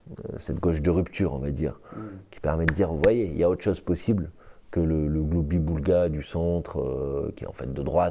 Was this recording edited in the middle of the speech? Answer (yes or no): no